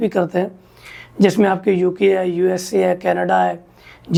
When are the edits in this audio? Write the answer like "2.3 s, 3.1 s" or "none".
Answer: none